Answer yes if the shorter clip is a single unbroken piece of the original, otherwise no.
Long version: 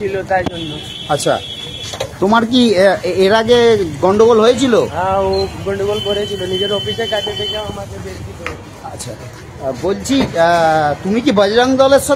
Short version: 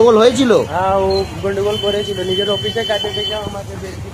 yes